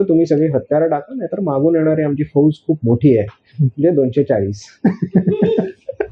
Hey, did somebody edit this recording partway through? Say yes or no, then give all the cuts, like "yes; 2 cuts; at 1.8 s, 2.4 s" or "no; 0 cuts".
no; 0 cuts